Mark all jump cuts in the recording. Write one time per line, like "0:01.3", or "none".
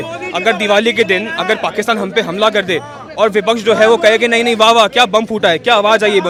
none